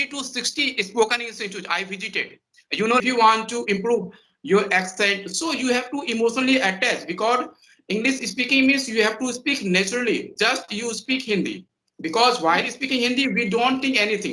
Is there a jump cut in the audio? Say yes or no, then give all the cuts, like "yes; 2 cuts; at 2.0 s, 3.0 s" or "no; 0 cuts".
yes; 1 cut; at 3.0 s